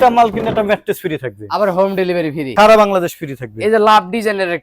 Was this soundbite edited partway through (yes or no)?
no